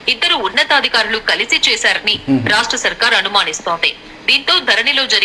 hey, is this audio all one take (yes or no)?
yes